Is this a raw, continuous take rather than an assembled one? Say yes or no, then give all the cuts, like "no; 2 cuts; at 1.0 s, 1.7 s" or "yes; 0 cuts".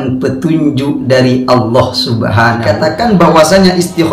no; 1 cut; at 2.6 s